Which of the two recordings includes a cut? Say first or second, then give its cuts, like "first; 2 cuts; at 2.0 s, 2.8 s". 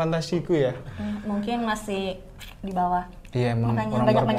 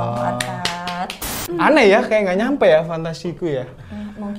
second; 1 cut; at 1.4 s